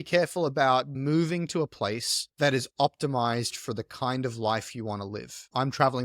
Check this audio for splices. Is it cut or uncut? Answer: cut